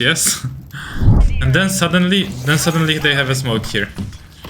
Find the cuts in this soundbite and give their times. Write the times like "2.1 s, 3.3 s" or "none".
1.2 s